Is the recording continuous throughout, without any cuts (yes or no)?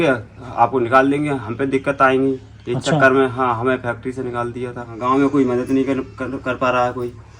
no